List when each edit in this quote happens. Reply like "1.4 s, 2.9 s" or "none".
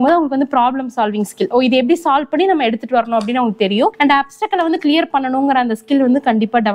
none